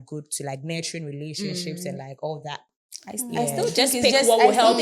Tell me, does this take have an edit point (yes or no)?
no